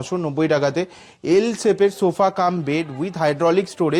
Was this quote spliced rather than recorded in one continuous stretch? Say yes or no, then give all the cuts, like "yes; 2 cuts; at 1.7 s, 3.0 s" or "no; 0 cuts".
no; 0 cuts